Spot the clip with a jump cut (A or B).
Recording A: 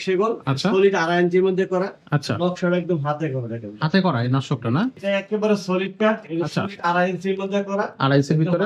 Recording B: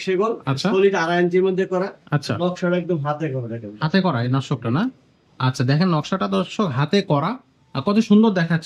A